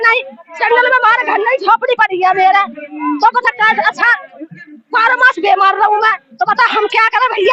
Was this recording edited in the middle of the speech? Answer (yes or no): no